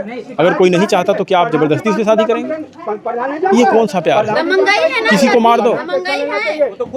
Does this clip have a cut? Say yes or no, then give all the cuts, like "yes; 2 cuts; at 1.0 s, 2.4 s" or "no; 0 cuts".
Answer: no; 0 cuts